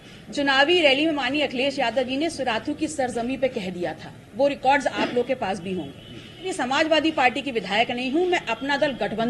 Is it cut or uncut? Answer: cut